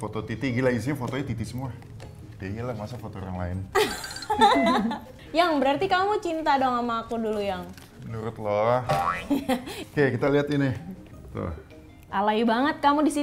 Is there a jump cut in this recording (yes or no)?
no